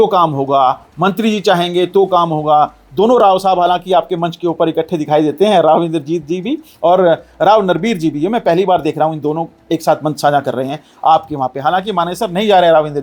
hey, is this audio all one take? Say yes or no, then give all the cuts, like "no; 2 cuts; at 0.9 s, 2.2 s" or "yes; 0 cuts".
yes; 0 cuts